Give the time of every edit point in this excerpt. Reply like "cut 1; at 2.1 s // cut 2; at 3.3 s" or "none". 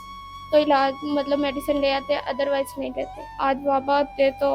cut 1; at 3.3 s

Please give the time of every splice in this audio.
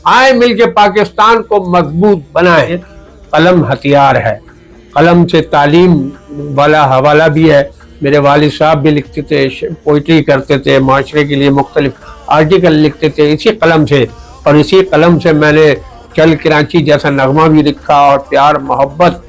cut 1; at 2.8 s

